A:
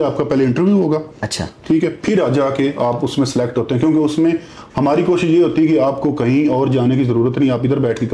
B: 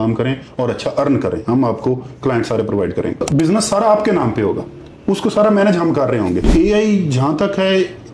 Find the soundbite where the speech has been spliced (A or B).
B